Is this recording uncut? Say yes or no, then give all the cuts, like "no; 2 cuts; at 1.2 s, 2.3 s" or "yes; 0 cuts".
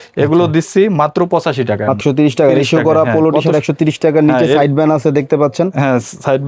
no; 1 cut; at 2.0 s